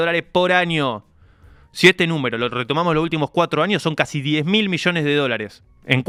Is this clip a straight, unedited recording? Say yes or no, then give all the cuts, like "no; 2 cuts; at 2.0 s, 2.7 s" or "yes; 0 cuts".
yes; 0 cuts